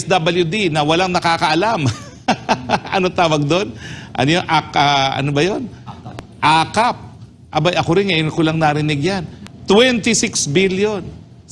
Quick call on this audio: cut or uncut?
uncut